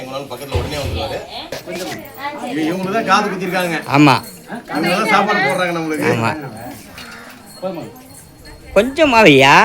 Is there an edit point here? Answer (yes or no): yes